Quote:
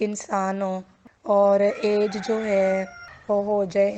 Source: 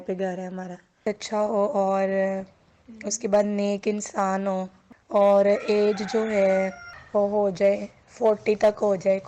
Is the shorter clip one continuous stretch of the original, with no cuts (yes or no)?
yes